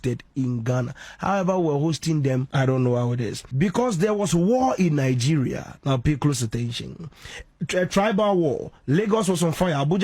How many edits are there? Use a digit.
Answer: 2